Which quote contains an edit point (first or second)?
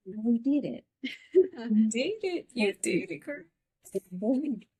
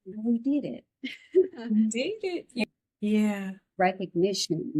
second